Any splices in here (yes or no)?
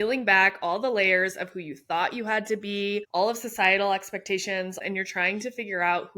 yes